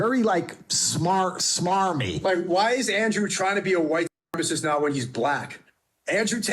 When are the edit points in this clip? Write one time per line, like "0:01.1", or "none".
0:02.1